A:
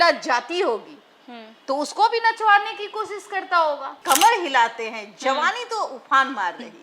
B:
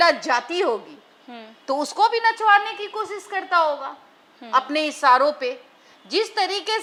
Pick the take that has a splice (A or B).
A